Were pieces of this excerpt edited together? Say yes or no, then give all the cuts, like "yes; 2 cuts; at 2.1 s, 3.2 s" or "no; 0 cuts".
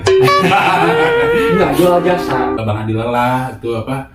yes; 1 cut; at 2.6 s